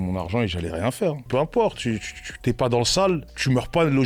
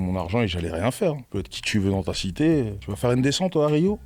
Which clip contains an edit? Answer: first; 1 cut; at 1.3 s

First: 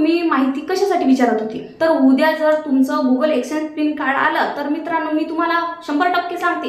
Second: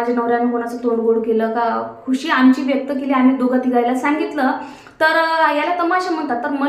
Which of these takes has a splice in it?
first; 1 cut; at 1.6 s

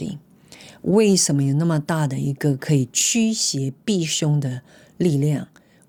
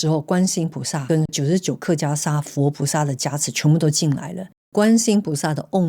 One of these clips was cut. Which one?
second; 2 cuts; at 1.3 s, 4.7 s

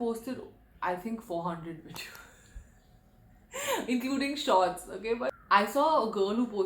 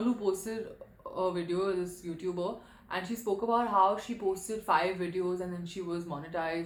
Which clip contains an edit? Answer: first; 1 cut; at 5.3 s

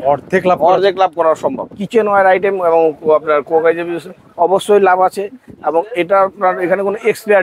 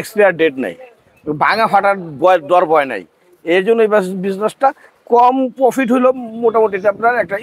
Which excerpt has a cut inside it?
first; 1 cut; at 1.7 s

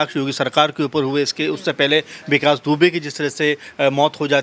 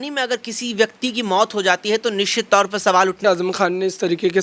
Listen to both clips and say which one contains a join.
second; 1 cut; at 3.2 s

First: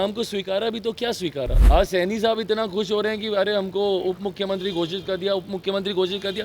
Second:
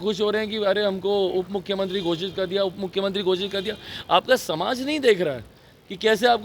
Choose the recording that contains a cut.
first; 1 cut; at 1.6 s

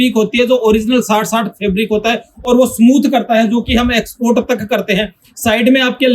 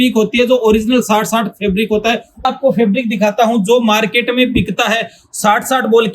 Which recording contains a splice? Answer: second; 1 cut; at 2.4 s

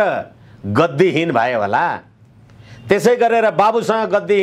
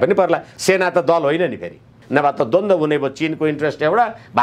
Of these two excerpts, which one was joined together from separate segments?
second; 1 cut; at 2.0 s

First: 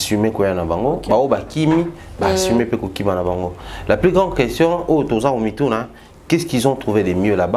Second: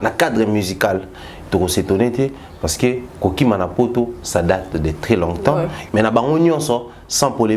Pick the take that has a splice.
second; 1 cut; at 5.8 s

